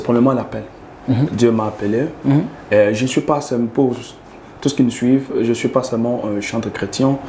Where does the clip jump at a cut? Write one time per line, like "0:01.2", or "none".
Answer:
none